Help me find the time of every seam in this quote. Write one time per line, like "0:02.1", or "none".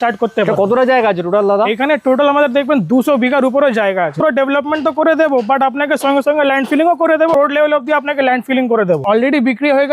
0:04.2
0:07.3
0:09.0